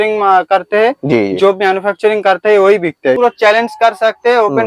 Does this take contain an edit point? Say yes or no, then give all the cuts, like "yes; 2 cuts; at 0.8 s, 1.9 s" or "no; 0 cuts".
yes; 1 cut; at 3.2 s